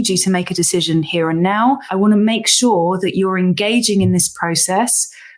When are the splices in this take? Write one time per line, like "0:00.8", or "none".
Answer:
0:01.9

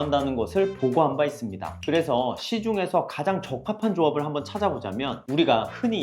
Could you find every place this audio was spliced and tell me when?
0:01.7

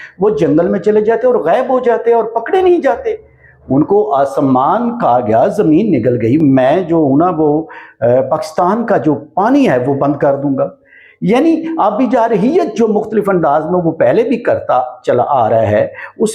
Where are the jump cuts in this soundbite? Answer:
0:06.4

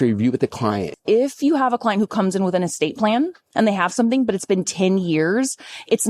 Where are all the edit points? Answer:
0:00.9

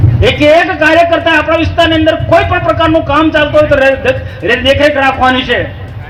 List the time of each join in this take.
none

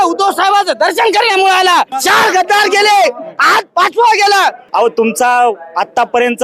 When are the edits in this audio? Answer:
0:02.0
0:04.6

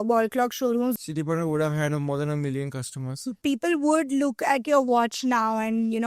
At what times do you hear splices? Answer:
0:01.0
0:03.4

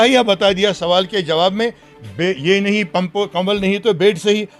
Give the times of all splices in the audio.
none

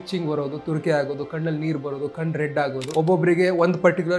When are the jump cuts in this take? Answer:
0:02.9

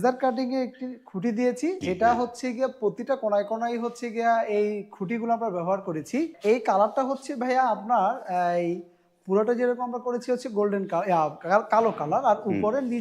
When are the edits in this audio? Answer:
0:01.8
0:06.4

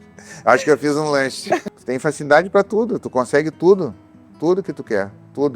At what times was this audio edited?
0:01.6

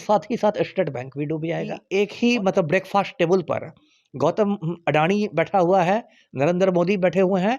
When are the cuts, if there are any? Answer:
0:01.8

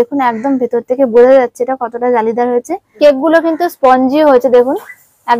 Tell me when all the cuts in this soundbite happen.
0:02.8

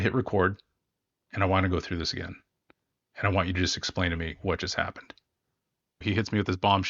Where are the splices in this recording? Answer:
0:06.0

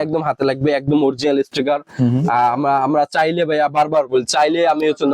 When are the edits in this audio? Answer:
none

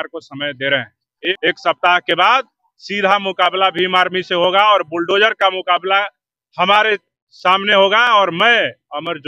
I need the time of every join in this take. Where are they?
0:01.3

